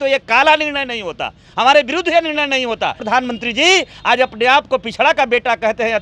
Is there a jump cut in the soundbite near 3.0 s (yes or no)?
yes